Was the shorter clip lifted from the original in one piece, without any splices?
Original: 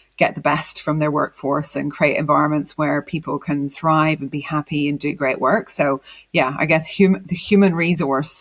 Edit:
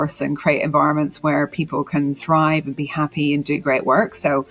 yes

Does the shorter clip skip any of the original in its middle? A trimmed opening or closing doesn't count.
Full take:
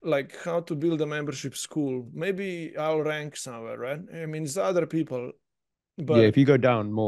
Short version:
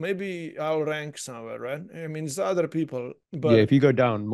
yes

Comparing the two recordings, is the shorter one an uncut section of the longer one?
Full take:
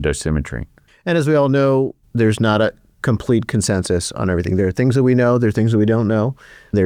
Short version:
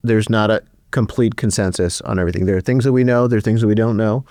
yes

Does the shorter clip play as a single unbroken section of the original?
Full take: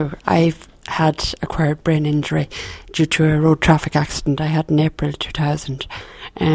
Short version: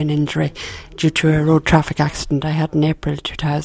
yes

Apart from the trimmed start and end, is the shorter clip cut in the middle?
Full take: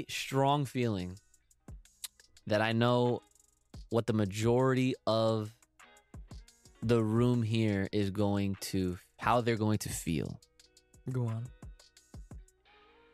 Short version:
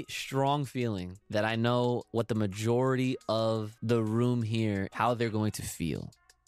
yes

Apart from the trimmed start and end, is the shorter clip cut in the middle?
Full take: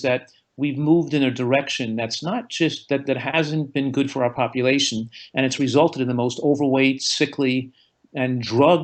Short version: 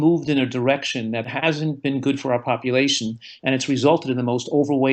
yes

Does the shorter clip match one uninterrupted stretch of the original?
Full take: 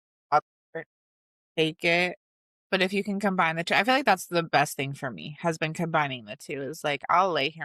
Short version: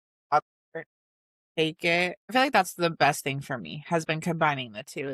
no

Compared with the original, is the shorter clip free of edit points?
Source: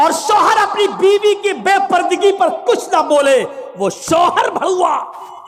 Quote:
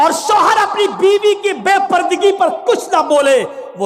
yes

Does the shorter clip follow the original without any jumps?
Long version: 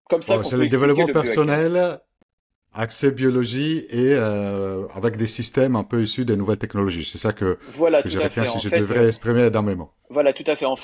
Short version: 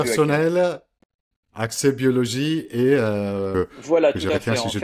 no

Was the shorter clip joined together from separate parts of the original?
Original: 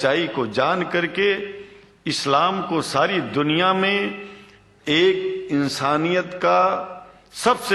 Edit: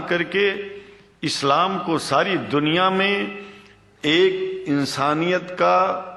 no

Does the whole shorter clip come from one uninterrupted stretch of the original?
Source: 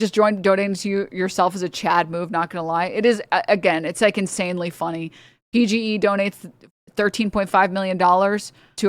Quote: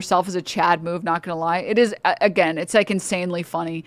yes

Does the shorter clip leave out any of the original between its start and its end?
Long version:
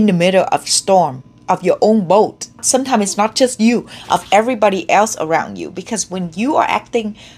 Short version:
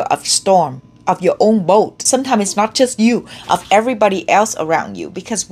yes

